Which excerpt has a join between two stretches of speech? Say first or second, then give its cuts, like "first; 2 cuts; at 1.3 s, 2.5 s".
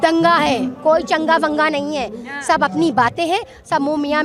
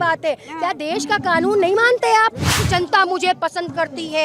second; 1 cut; at 2.5 s